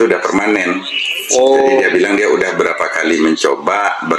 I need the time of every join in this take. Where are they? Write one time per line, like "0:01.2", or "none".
none

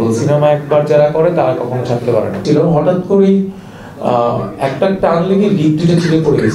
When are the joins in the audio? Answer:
0:02.4

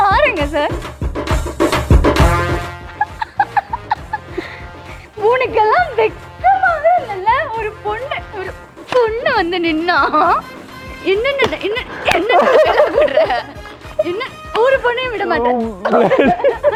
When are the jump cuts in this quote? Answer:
none

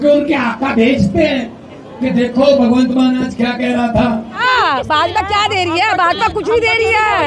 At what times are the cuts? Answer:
0:04.4

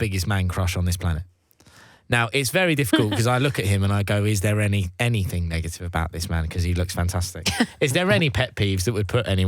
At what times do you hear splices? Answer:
none

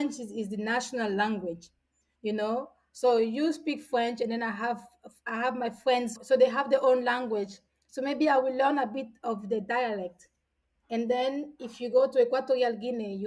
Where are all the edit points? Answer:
none

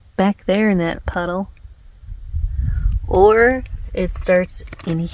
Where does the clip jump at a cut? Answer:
none

